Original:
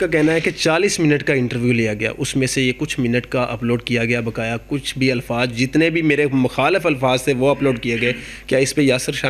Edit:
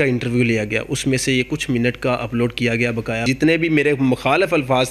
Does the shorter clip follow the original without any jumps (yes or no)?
no